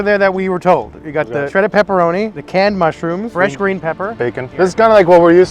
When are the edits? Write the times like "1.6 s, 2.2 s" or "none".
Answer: 1.5 s, 2.4 s, 3.3 s, 4.5 s